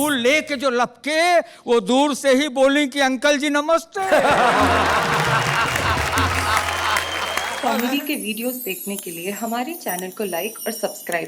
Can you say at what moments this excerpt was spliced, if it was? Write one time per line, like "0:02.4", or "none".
0:07.5